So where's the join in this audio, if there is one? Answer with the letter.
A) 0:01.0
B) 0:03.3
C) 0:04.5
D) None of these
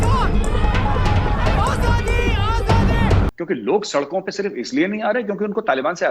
B